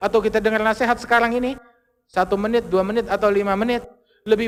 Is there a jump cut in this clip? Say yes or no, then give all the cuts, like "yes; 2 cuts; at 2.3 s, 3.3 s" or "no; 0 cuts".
no; 0 cuts